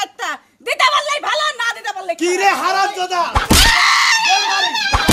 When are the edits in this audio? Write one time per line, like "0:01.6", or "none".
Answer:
none